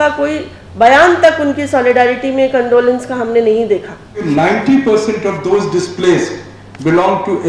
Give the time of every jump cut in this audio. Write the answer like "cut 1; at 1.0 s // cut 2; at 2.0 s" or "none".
cut 1; at 4.2 s